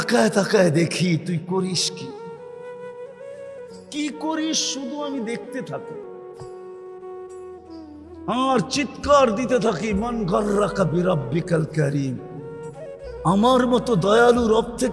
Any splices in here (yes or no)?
yes